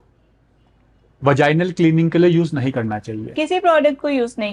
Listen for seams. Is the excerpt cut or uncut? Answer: uncut